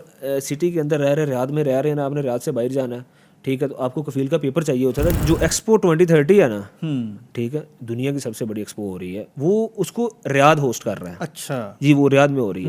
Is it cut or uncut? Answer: cut